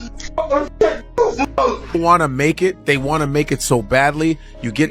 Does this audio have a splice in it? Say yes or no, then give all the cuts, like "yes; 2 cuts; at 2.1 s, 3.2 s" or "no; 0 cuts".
yes; 1 cut; at 2.0 s